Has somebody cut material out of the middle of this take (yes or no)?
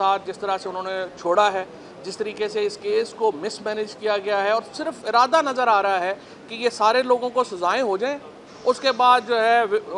no